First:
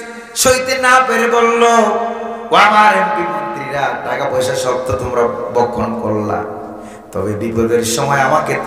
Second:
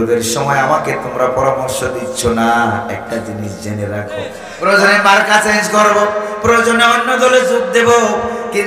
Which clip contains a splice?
second; 1 cut; at 4.4 s

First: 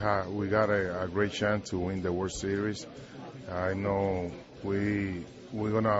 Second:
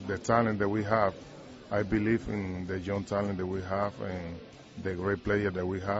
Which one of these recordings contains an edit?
first; 1 cut; at 4.5 s

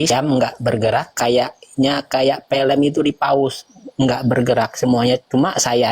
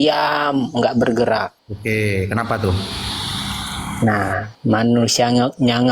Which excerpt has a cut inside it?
second; 2 cuts; at 1.7 s, 4.5 s

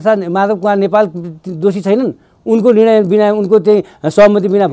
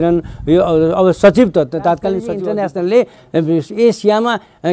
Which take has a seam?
second; 1 cut; at 2.2 s

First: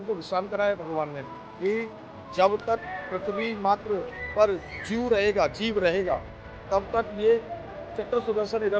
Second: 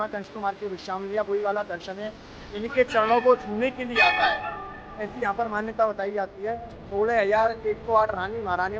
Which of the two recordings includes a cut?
second; 1 cut; at 6.7 s

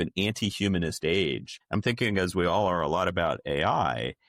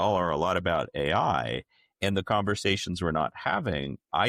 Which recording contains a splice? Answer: first; 1 cut; at 1.5 s

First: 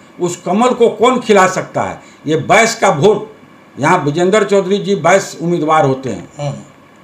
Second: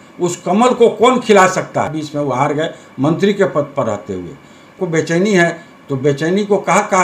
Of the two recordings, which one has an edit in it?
second; 2 cuts; at 2.0 s, 4.8 s

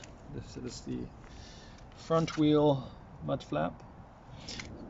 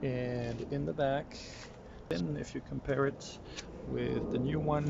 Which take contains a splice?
second; 1 cut; at 2.0 s

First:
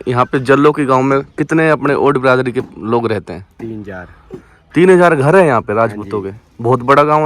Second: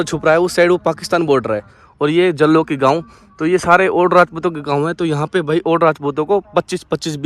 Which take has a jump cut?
second; 1 cut; at 1.8 s

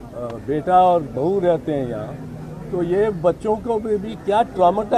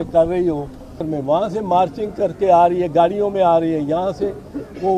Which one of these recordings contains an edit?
second; 1 cut; at 1.0 s

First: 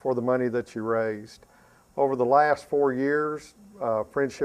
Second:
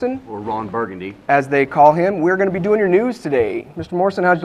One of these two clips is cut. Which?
first; 1 cut; at 2.6 s

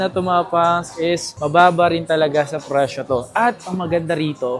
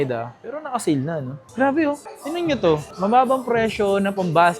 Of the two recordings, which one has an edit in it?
second; 1 cut; at 1.4 s

